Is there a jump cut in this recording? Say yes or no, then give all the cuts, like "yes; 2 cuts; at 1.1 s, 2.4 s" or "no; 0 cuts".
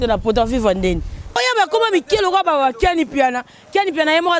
yes; 1 cut; at 1.4 s